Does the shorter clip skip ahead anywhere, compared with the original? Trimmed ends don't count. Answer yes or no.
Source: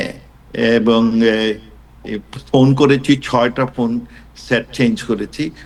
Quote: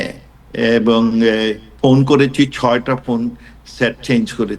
yes